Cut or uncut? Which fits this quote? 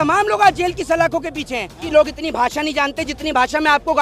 cut